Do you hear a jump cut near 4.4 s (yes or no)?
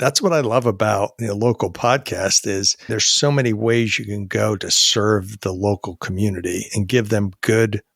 no